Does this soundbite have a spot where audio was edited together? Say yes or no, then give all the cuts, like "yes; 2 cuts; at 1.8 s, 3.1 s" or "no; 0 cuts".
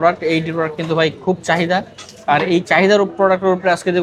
no; 0 cuts